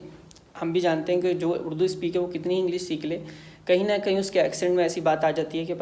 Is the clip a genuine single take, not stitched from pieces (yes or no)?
yes